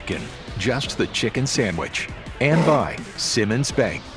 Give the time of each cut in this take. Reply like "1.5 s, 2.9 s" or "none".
2.3 s